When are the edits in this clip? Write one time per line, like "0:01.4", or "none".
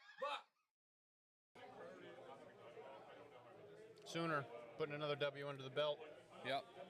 0:01.4